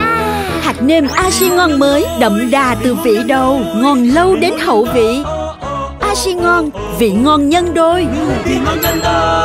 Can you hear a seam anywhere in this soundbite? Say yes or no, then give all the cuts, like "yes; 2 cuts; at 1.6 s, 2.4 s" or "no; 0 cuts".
no; 0 cuts